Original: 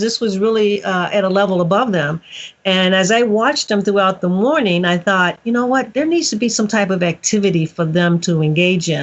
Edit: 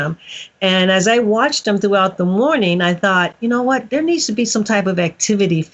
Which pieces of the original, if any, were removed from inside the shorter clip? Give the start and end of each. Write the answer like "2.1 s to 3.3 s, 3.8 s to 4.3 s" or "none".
none